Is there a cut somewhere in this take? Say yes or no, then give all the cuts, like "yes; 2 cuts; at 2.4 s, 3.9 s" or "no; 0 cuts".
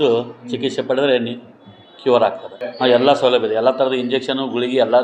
yes; 1 cut; at 2.6 s